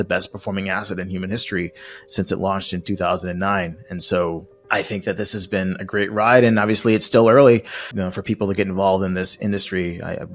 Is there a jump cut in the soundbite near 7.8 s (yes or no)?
yes